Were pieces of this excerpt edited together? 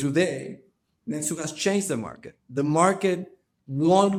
no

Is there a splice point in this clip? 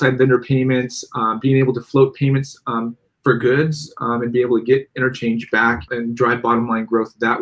yes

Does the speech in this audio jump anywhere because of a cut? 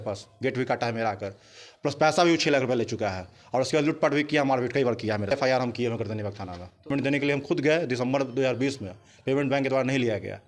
yes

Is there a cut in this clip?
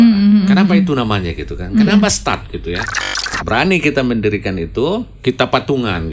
yes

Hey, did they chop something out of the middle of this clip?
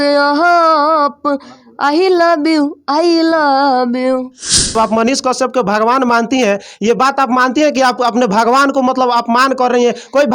yes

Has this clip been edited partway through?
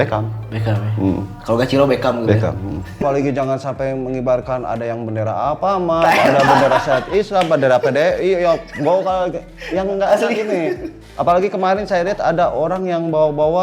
yes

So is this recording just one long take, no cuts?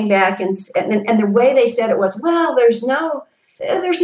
yes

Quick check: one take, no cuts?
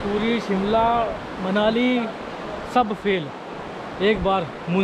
yes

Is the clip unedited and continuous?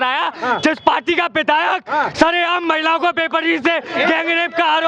yes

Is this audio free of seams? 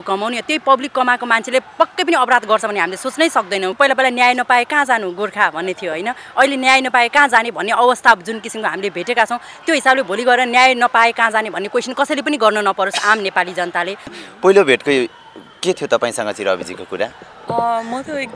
no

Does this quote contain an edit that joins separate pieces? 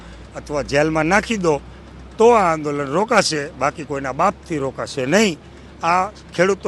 no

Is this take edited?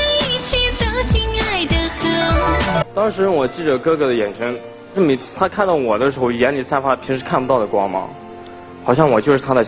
yes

